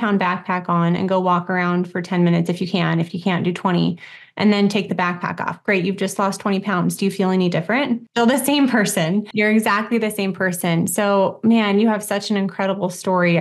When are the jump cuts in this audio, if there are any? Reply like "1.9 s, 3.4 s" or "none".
8.0 s, 9.3 s